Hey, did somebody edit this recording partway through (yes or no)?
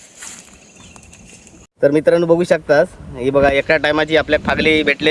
yes